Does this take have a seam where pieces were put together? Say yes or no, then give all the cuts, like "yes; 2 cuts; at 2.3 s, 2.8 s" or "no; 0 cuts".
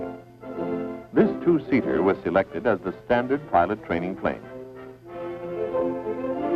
no; 0 cuts